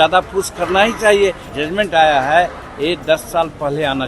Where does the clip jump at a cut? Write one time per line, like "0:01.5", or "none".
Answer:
0:01.4